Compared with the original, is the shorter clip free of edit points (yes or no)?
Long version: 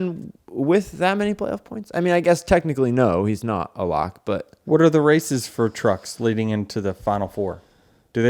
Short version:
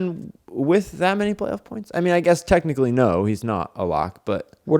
yes